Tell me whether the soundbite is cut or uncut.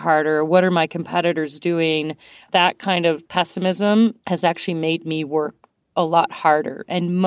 cut